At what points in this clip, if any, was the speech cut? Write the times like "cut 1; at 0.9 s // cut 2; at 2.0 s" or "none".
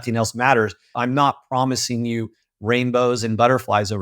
cut 1; at 0.9 s

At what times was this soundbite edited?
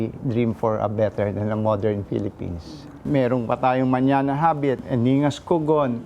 cut 1; at 3.0 s // cut 2; at 4.8 s

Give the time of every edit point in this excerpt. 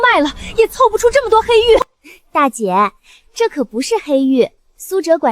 cut 1; at 2.0 s

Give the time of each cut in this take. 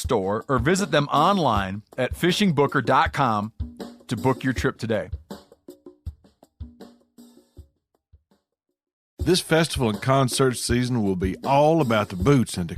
cut 1; at 9.2 s

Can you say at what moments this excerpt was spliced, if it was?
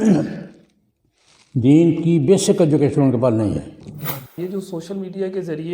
cut 1; at 4.4 s

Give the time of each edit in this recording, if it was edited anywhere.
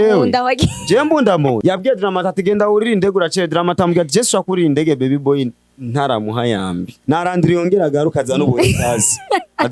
cut 1; at 1.6 s // cut 2; at 6.9 s

